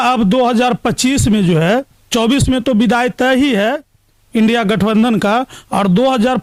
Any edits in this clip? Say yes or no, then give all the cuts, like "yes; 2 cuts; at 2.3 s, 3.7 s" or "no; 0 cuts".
no; 0 cuts